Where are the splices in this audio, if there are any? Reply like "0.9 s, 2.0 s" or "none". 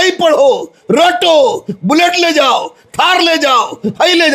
none